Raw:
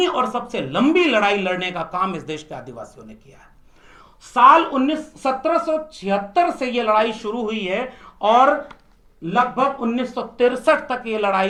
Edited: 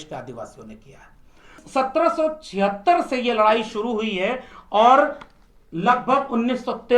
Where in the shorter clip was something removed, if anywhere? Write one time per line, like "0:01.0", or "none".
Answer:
0:01.6